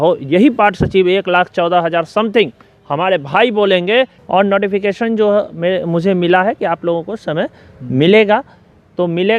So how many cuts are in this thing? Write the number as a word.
one